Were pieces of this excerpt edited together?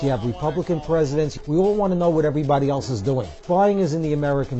yes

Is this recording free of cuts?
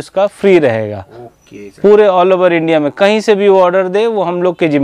yes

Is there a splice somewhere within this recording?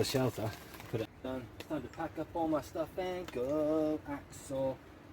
yes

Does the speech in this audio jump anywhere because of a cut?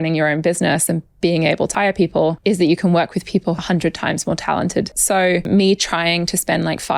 yes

